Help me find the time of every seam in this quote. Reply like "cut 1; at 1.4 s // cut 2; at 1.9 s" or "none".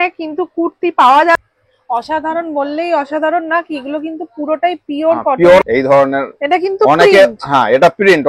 cut 1; at 1.4 s // cut 2; at 5.6 s